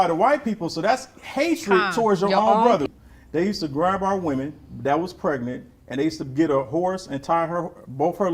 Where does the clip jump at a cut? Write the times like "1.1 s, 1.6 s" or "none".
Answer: 2.9 s